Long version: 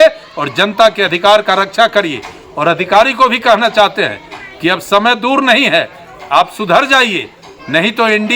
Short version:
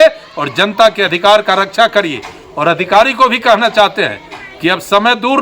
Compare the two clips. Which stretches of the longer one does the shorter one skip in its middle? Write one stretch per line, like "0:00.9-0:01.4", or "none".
none